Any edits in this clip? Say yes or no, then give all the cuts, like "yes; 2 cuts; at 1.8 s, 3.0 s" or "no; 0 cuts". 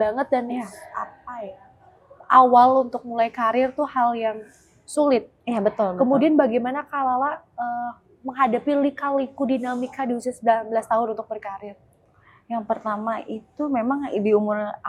no; 0 cuts